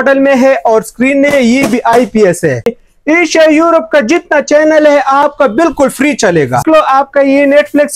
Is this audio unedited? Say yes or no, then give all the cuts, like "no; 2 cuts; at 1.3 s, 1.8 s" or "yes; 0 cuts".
no; 2 cuts; at 2.7 s, 6.6 s